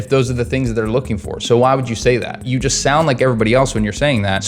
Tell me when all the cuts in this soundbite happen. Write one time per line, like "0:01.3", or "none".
0:02.4